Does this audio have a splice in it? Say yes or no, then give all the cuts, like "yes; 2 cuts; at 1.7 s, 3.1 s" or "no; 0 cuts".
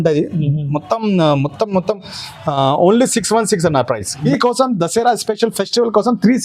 yes; 1 cut; at 4.3 s